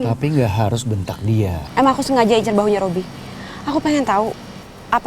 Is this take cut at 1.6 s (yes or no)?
yes